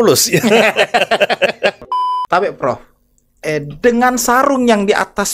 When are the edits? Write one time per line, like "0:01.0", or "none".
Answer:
0:01.8